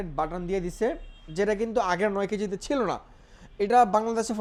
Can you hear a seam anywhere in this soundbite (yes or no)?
no